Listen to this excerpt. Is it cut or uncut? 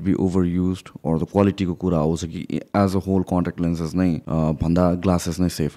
cut